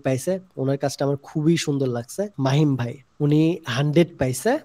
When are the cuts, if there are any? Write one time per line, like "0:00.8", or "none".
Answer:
0:02.3
0:03.0